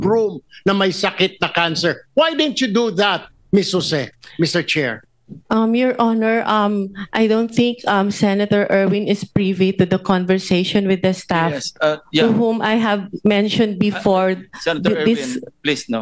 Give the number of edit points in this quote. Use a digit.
0